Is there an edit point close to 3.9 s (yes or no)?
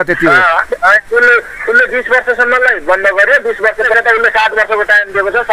yes